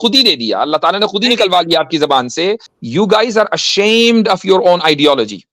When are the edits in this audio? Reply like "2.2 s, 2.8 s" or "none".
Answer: 2.7 s